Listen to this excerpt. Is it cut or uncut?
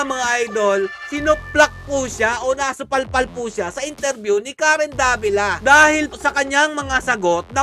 uncut